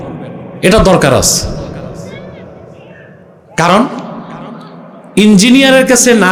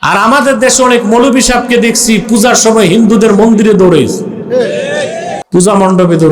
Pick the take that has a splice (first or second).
second